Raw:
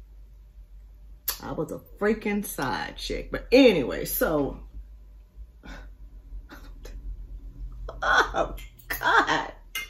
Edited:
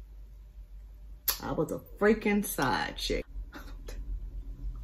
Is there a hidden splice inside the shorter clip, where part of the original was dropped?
yes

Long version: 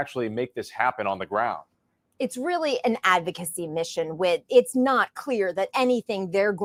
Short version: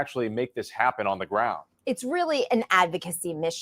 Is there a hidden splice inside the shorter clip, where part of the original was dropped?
yes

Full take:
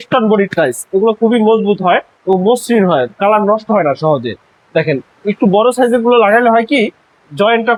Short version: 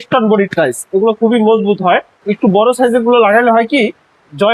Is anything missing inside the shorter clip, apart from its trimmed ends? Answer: yes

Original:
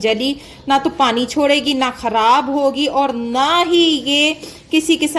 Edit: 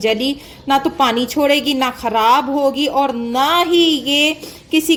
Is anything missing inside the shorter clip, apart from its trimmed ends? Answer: no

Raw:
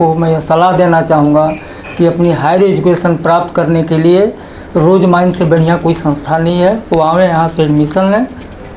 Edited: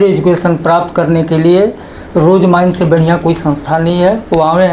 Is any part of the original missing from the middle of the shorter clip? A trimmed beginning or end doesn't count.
no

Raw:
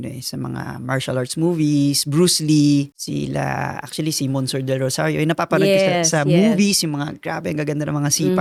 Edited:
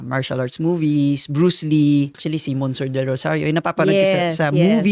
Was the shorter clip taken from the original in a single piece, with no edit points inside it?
no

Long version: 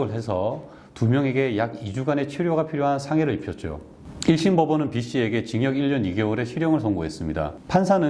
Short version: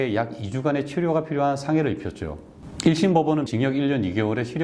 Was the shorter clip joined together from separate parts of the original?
yes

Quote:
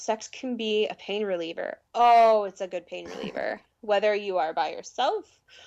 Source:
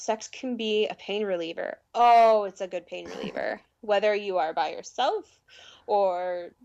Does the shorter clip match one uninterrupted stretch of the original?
yes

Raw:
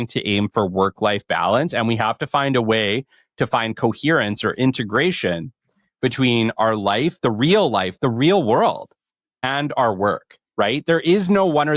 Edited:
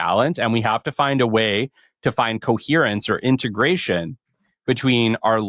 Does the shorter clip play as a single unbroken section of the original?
yes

